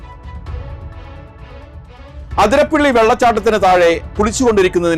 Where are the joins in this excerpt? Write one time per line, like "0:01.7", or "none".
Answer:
0:01.0
0:02.1